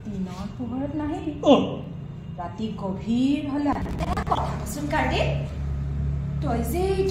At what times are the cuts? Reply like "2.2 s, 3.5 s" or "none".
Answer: 4.4 s